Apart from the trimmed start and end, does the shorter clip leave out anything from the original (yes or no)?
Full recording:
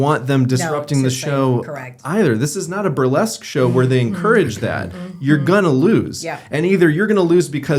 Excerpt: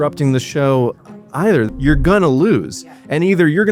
yes